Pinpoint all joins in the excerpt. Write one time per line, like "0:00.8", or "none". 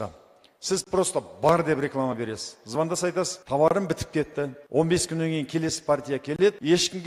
none